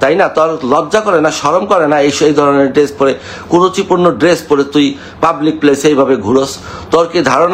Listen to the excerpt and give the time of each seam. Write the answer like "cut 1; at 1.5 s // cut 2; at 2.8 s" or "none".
none